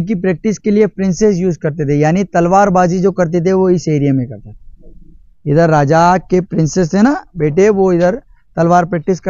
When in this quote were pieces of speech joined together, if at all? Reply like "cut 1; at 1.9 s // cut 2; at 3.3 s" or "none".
none